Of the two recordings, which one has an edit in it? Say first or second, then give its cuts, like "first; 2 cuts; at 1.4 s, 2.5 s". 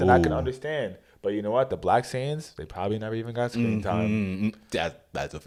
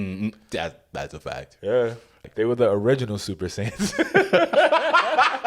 second; 1 cut; at 2.3 s